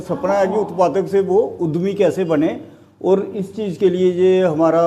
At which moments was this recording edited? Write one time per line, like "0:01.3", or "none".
none